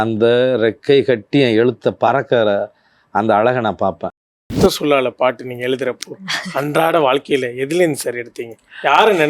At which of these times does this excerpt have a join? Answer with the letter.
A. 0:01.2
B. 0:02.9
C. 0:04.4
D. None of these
C